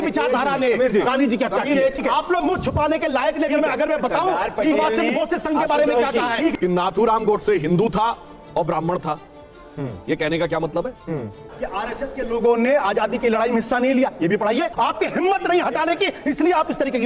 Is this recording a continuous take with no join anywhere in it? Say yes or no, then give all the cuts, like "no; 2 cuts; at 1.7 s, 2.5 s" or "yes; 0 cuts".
no; 4 cuts; at 2.0 s, 6.6 s, 11.5 s, 14.7 s